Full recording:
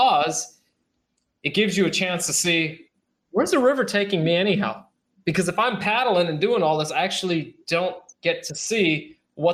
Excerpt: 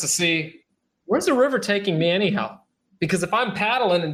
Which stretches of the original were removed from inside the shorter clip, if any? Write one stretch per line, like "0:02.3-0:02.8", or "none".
none

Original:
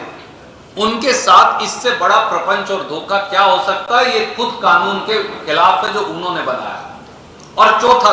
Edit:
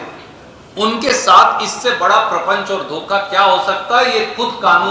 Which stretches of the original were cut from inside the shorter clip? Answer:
none

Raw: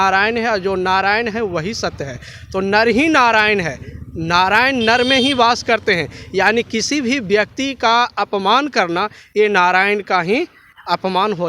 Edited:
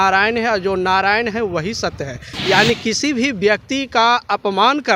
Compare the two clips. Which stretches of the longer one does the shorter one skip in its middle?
0:02.3-0:06.2

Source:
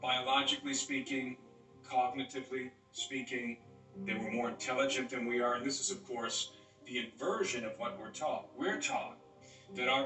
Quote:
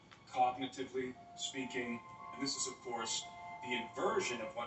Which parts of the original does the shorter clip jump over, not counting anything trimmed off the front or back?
0:03.9-0:05.6

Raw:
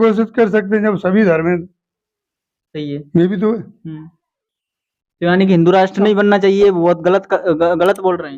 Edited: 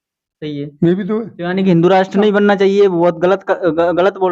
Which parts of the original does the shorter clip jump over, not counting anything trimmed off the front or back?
0:03.7-0:05.2

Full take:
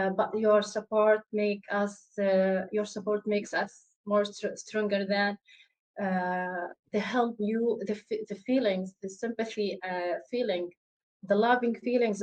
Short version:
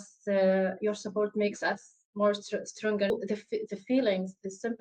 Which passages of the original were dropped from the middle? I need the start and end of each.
0:05.0-0:07.7

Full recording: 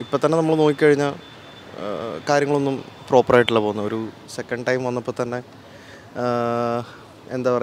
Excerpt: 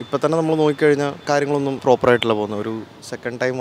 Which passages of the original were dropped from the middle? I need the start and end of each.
0:01.6-0:02.9

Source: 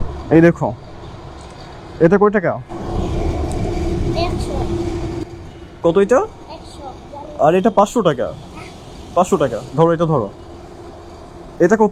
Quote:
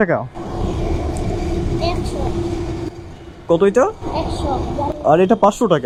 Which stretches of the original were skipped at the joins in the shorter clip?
none

